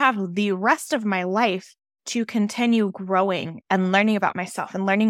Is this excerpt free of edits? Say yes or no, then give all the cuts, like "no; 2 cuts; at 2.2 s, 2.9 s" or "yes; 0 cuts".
no; 1 cut; at 3.5 s